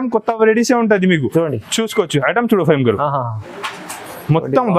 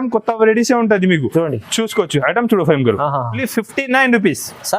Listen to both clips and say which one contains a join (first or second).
second